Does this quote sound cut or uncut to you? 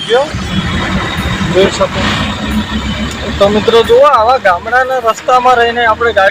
cut